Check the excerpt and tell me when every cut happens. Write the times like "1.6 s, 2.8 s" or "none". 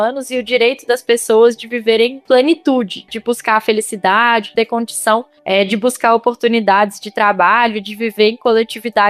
3.1 s, 4.5 s

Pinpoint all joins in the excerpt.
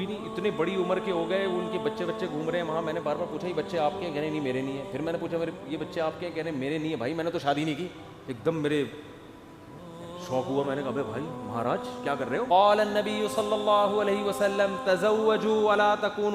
12.5 s

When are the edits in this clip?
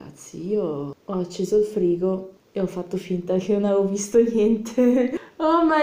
1.0 s

